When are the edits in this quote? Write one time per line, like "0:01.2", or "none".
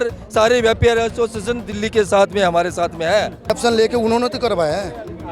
0:03.5